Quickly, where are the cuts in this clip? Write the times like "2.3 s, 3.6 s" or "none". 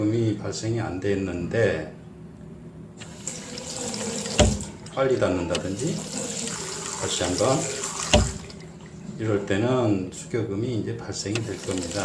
none